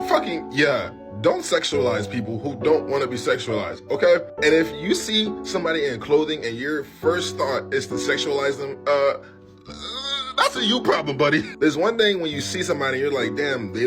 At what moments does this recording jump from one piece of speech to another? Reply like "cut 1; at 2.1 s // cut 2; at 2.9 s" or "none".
cut 1; at 4.3 s

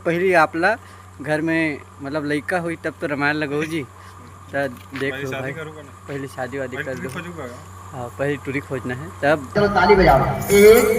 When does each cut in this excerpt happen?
cut 1; at 9.5 s

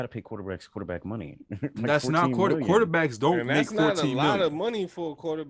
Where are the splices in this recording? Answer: none

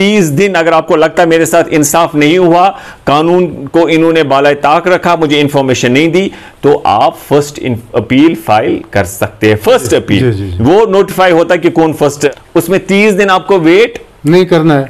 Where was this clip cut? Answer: cut 1; at 12.3 s

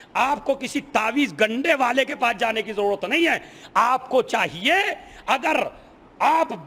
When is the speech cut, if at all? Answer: none

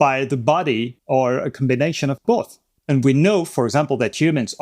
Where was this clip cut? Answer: cut 1; at 1.0 s // cut 2; at 2.5 s

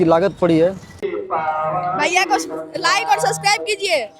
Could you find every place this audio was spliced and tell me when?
cut 1; at 1.1 s

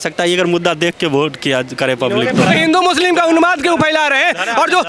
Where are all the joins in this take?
cut 1; at 2.5 s

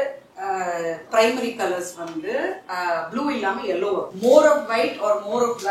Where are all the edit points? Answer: cut 1; at 2.7 s // cut 2; at 4.1 s

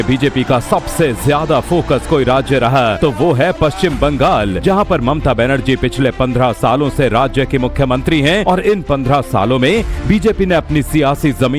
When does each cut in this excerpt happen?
cut 1; at 8.4 s

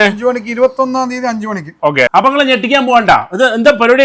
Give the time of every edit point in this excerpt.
cut 1; at 2.1 s

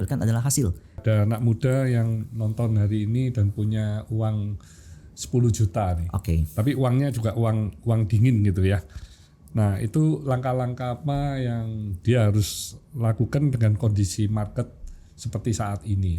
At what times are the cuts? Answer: cut 1; at 1.0 s

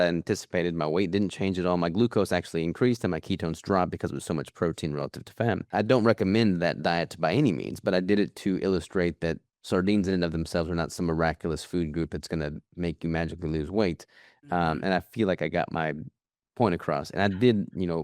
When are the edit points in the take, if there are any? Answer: cut 1; at 5.6 s

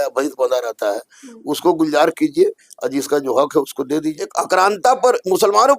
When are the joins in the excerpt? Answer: cut 1; at 4.3 s

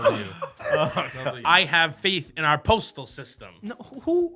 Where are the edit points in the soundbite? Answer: cut 1; at 1.4 s

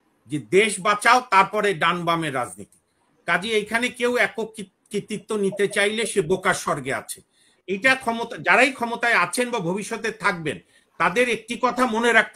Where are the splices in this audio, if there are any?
cut 1; at 7.5 s

